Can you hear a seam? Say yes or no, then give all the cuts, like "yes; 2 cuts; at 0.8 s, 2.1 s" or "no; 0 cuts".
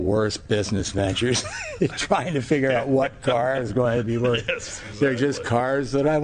no; 0 cuts